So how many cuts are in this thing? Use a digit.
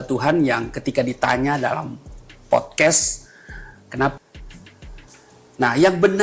1